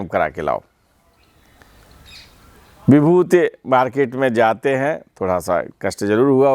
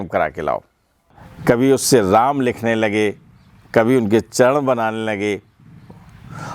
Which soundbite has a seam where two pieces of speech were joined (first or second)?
second